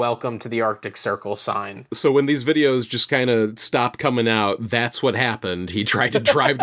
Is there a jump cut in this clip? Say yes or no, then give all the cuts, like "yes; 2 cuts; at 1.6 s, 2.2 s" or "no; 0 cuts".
yes; 1 cut; at 2.0 s